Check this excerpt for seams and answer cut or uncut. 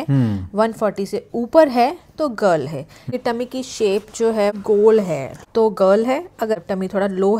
cut